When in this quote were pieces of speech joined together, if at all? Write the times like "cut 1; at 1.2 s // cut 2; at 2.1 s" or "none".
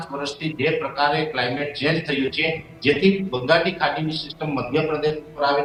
none

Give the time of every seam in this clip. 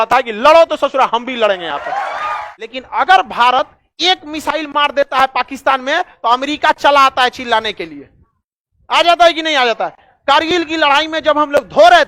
cut 1; at 2.8 s

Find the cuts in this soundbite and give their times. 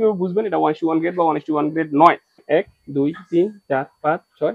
cut 1; at 2.4 s

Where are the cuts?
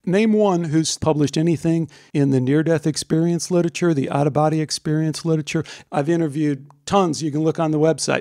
cut 1; at 1.0 s // cut 2; at 2.0 s // cut 3; at 5.8 s

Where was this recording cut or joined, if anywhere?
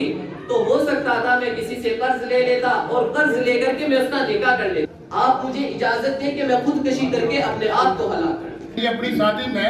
cut 1; at 4.9 s // cut 2; at 8.7 s

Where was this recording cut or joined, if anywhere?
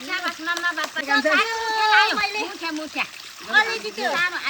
cut 1; at 1.0 s

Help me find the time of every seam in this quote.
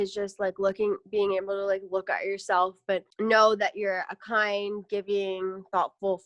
none

